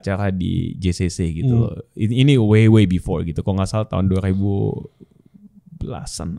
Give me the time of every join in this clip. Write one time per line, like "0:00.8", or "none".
none